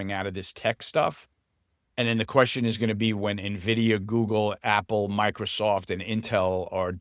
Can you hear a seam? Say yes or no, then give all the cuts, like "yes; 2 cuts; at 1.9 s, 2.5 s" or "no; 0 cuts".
no; 0 cuts